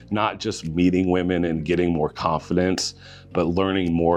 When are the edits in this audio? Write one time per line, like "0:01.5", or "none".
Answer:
none